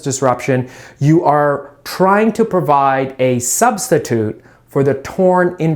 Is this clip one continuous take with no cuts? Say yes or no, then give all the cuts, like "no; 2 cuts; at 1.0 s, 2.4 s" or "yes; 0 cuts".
yes; 0 cuts